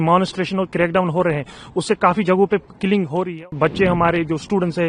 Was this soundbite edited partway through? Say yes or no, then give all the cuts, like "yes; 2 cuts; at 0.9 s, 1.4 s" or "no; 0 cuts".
yes; 1 cut; at 3.5 s